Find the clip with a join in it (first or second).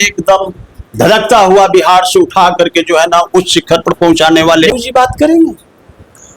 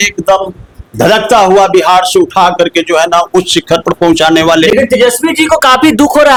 first